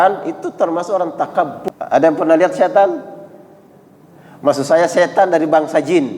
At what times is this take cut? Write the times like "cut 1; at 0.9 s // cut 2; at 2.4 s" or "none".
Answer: cut 1; at 1.6 s